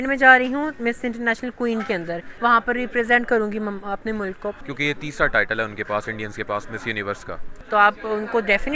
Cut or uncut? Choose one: cut